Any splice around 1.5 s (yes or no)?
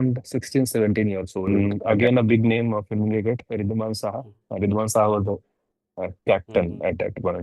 yes